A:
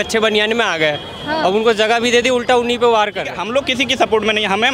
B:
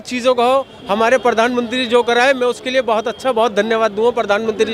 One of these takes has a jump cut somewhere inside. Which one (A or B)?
A